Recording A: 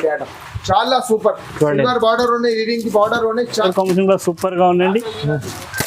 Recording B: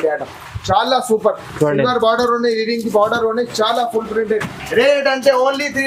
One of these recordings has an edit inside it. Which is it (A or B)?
A